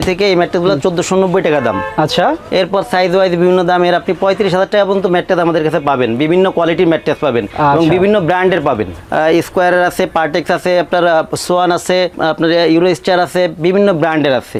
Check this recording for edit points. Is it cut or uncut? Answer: uncut